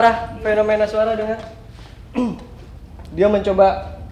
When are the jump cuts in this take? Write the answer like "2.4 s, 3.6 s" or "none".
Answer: none